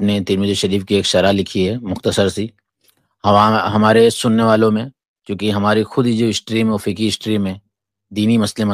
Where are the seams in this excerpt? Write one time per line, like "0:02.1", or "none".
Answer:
none